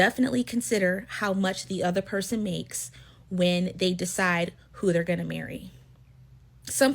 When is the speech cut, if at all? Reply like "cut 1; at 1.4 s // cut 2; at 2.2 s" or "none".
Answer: cut 1; at 2.1 s